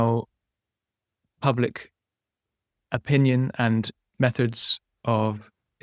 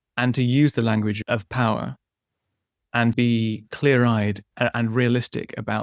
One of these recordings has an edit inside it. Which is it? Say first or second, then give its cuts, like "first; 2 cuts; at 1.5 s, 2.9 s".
second; 3 cuts; at 1.2 s, 3.1 s, 4.4 s